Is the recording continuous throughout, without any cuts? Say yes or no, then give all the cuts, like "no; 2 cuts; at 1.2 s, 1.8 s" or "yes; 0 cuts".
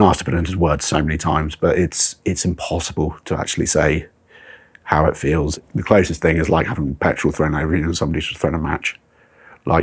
no; 1 cut; at 5.5 s